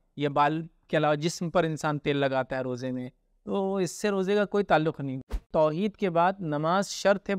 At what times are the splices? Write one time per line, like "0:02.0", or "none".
0:05.3